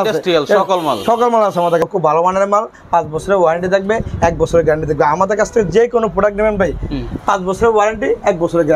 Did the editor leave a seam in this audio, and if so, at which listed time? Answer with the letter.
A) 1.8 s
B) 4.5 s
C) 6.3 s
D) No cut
A